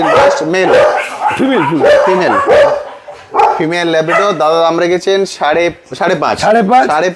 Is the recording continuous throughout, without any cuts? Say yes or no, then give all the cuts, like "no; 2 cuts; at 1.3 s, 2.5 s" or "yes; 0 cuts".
yes; 0 cuts